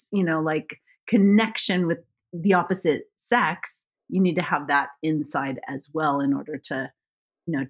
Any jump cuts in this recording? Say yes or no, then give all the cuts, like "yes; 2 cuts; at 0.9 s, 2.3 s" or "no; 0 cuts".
no; 0 cuts